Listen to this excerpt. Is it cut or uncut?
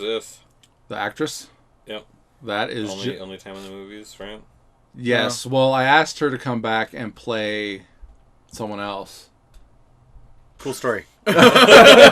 cut